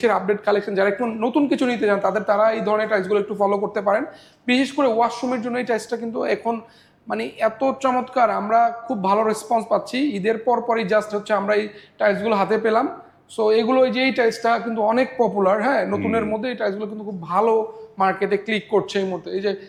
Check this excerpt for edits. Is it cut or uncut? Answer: uncut